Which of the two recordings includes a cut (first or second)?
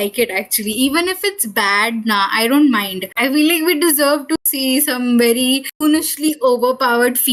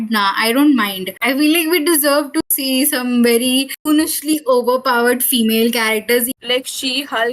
second